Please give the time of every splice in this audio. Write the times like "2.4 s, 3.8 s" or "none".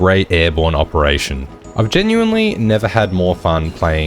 1.6 s